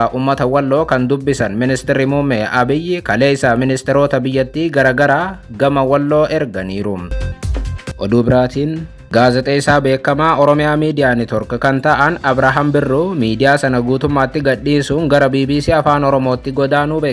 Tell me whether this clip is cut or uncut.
cut